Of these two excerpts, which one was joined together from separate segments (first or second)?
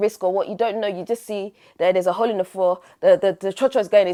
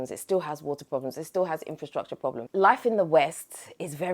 second